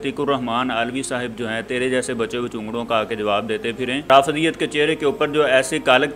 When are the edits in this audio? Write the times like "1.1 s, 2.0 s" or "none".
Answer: 4.0 s